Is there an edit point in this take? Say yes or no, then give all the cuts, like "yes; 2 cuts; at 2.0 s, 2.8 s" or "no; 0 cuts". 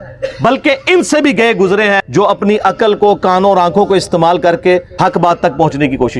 yes; 2 cuts; at 2.0 s, 4.9 s